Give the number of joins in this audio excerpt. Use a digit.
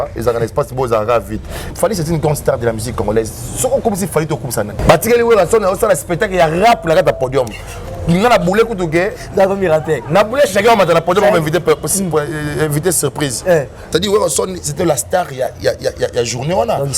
3